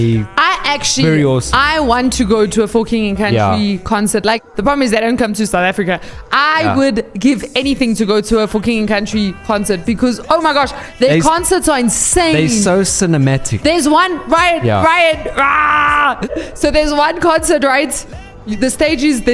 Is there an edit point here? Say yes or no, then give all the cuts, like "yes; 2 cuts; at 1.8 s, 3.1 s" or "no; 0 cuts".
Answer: yes; 2 cuts; at 4.5 s, 16.3 s